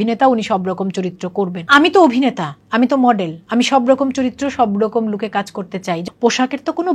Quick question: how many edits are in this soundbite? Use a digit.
2